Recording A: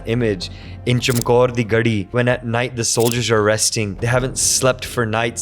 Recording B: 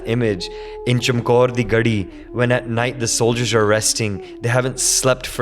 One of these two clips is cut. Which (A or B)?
A